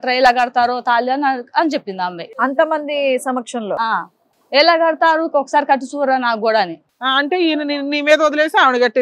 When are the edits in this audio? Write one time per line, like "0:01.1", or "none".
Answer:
0:02.2
0:06.9